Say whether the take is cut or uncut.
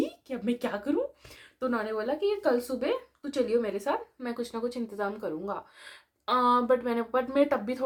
uncut